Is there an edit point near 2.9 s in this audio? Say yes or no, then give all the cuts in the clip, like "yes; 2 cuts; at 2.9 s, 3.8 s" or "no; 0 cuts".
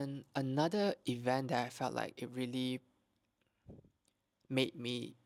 no; 0 cuts